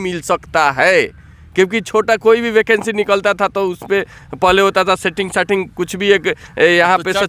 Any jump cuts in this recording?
no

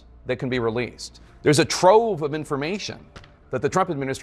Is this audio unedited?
yes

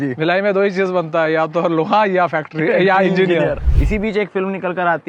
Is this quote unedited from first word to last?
no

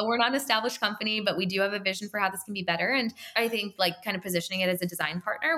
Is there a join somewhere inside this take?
yes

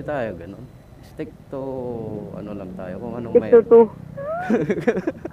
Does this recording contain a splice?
no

